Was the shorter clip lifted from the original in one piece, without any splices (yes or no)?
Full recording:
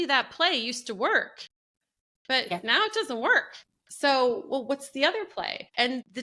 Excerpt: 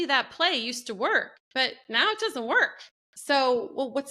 no